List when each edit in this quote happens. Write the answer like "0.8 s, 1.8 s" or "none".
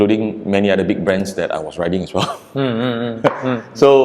none

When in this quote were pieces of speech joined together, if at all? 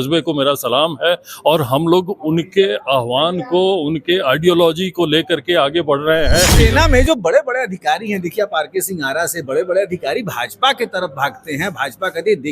6.5 s

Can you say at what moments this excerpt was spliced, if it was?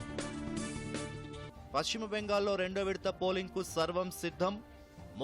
1.1 s

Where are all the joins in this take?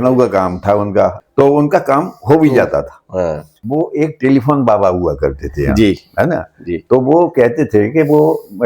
1.2 s, 3.5 s

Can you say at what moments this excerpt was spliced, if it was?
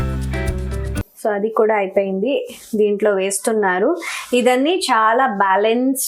1.0 s

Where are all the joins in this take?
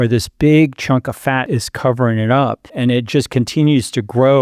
1.4 s, 2.7 s

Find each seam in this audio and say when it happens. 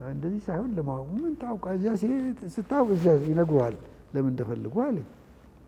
none

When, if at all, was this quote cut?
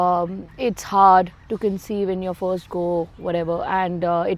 none

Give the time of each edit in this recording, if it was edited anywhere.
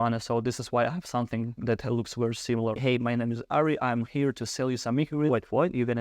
2.8 s

